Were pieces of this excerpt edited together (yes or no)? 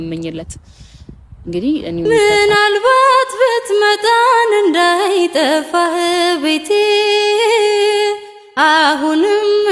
yes